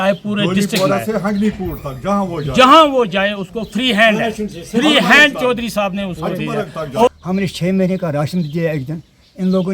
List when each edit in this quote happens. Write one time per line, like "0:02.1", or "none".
0:07.1